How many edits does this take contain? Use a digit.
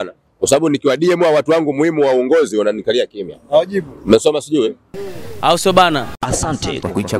1